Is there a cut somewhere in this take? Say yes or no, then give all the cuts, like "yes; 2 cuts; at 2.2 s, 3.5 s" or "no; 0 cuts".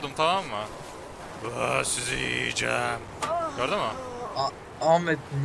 no; 0 cuts